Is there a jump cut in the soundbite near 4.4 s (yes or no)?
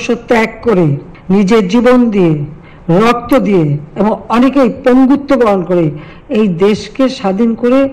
no